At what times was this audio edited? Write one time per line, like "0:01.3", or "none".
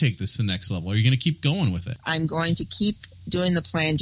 0:01.9